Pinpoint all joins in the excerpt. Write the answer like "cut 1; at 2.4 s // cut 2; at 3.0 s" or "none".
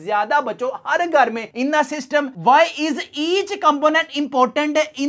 cut 1; at 1.4 s